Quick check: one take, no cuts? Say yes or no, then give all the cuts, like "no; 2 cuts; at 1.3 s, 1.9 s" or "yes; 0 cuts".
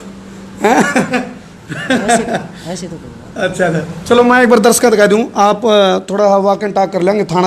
yes; 0 cuts